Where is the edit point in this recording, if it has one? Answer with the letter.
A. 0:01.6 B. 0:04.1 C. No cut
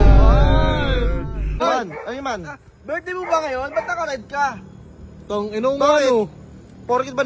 A